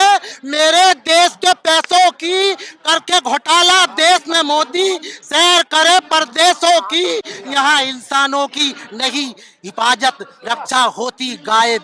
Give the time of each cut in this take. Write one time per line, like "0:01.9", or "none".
none